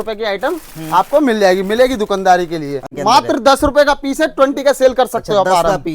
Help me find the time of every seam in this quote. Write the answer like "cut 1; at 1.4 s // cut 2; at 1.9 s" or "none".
cut 1; at 2.9 s